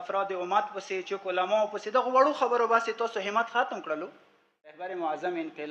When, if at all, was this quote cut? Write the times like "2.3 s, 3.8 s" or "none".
4.8 s